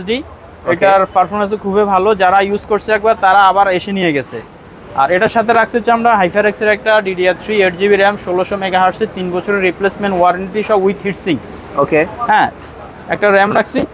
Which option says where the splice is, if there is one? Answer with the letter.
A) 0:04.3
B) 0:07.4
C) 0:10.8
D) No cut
D